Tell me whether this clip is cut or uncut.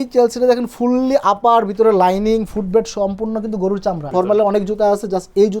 cut